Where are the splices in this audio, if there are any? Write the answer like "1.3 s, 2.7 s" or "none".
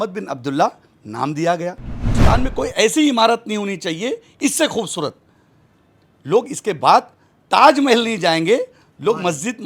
2.1 s